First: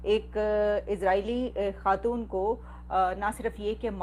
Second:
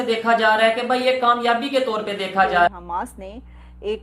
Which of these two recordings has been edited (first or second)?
second